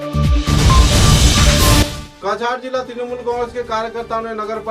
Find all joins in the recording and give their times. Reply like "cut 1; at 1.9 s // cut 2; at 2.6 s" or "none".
cut 1; at 2.1 s

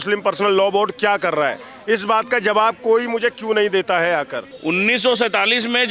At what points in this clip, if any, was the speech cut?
cut 1; at 4.4 s

